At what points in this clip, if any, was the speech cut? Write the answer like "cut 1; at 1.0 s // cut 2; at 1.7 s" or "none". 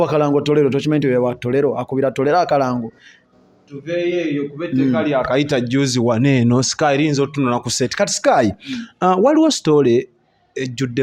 none